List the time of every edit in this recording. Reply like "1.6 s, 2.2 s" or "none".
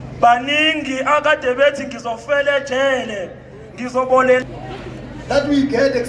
4.4 s